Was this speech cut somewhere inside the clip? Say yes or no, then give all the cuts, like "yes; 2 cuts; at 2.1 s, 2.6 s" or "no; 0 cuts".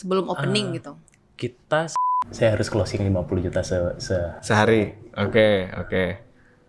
yes; 1 cut; at 2.0 s